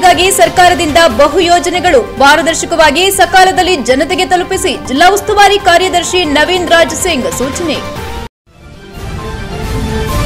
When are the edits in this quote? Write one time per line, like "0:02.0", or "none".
0:08.3